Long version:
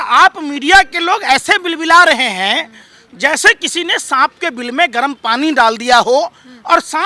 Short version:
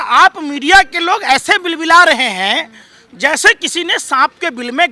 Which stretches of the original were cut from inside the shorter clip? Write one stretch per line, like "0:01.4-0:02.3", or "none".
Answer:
none